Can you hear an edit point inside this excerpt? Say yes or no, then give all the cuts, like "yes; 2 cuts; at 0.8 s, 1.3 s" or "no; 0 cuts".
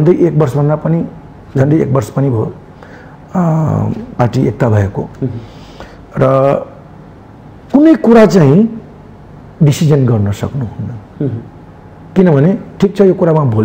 no; 0 cuts